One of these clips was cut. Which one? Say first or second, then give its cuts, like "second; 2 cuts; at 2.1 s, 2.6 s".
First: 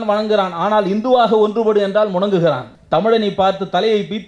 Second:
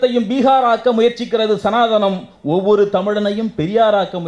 first; 1 cut; at 2.7 s